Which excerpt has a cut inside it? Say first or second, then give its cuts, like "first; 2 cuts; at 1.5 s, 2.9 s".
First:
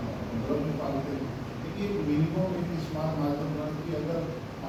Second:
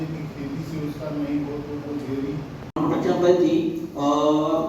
second; 1 cut; at 2.8 s